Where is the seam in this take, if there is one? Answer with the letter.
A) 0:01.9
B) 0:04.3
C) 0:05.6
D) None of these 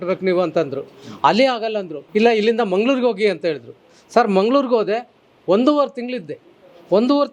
A